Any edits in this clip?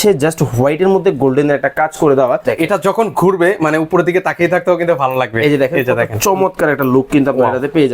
yes; 1 cut; at 2.5 s

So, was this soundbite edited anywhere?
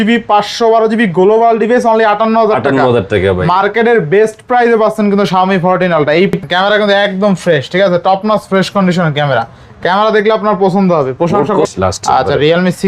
yes; 2 cuts; at 6.4 s, 11.6 s

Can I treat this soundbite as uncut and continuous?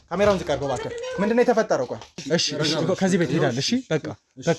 no; 1 cut; at 2.1 s

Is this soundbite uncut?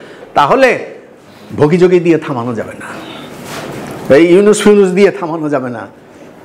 yes; 0 cuts

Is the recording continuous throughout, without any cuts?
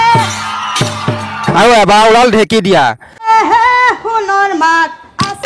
no; 2 cuts; at 1.5 s, 3.3 s

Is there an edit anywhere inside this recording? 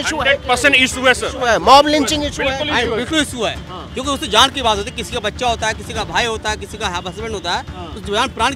no; 0 cuts

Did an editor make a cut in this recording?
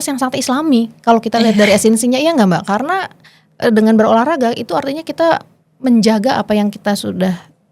no; 0 cuts

